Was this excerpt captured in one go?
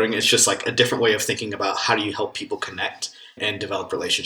no; 1 cut; at 3.4 s

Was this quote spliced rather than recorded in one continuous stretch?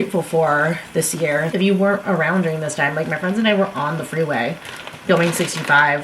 no; 0 cuts

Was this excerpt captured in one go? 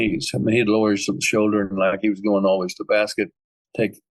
yes; 0 cuts

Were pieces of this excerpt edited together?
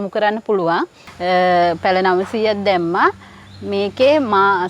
yes; 1 cut; at 1.0 s

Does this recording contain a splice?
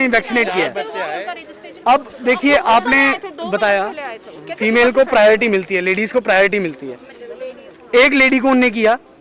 no; 0 cuts

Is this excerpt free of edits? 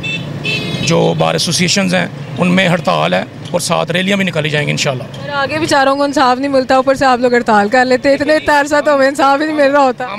yes; 0 cuts

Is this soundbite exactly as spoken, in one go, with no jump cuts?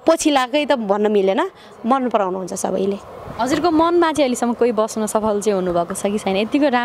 yes; 0 cuts

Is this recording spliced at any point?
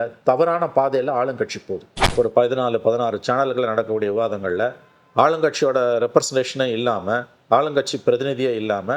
yes; 1 cut; at 2.0 s

